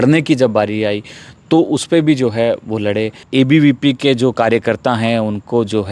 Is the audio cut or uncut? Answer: cut